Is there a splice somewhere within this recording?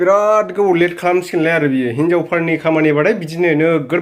no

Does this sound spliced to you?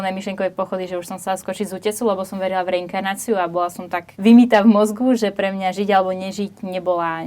yes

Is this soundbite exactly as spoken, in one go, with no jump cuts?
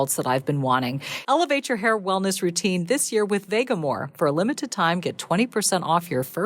no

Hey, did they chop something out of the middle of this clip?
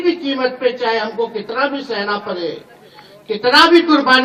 no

